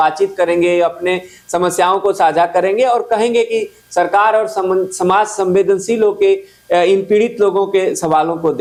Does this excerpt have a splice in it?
no; 0 cuts

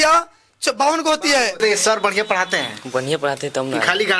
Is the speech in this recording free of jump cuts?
no; 1 cut; at 1.6 s

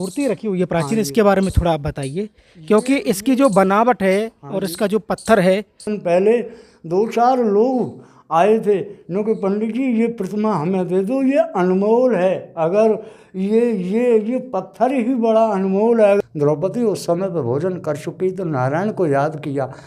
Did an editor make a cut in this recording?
yes; 2 cuts; at 5.9 s, 16.2 s

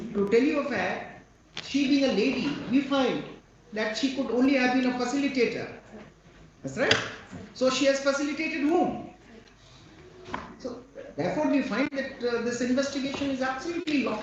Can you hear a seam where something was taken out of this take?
no; 0 cuts

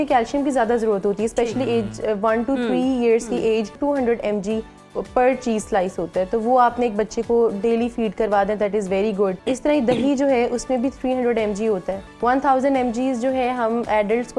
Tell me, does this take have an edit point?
yes; 3 cuts; at 3.8 s, 9.4 s, 12.0 s

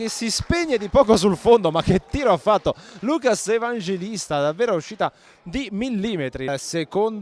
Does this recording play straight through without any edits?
yes; 0 cuts

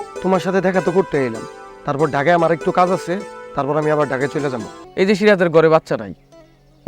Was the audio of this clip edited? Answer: yes; 1 cut; at 4.8 s

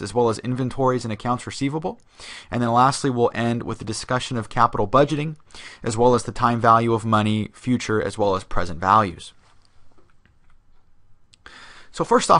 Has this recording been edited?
no; 0 cuts

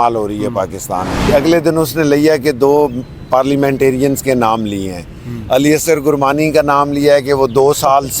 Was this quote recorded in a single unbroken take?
no; 1 cut; at 1.1 s

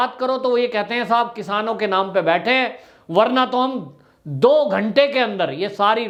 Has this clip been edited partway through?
no; 0 cuts

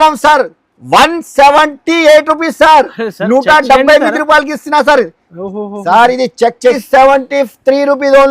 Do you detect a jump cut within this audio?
yes; 1 cut; at 6.8 s

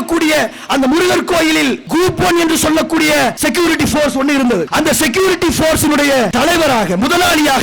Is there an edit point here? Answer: yes; 4 cuts; at 1.8 s, 3.4 s, 4.7 s, 6.3 s

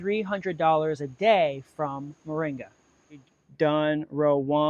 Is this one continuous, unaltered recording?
no; 1 cut; at 3.4 s

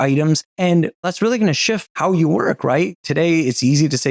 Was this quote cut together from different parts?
yes; 3 cuts; at 1.0 s, 1.9 s, 3.0 s

